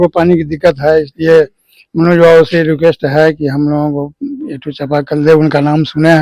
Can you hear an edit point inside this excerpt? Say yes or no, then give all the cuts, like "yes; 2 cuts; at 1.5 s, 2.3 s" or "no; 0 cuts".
no; 0 cuts